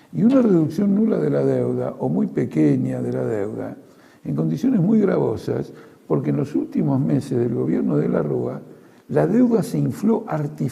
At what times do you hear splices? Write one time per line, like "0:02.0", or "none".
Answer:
0:06.1